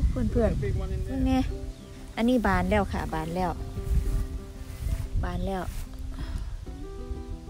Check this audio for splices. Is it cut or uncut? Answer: cut